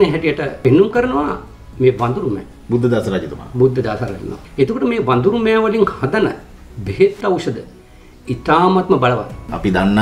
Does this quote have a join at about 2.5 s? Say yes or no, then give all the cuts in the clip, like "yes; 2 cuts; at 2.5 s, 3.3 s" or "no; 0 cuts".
no; 0 cuts